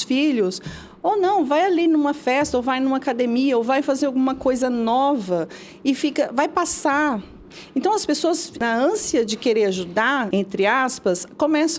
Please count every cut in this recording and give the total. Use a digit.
2